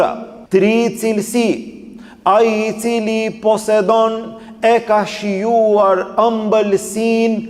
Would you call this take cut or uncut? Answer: uncut